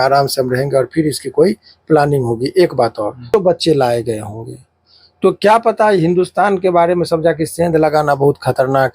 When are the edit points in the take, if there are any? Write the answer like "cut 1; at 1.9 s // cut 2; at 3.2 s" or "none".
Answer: cut 1; at 3.3 s